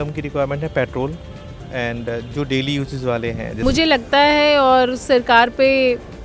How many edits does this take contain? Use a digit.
1